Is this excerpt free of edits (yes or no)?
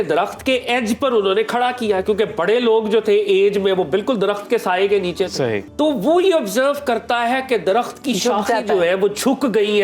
no